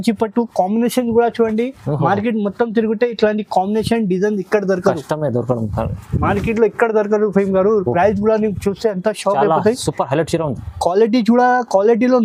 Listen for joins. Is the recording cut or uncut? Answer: uncut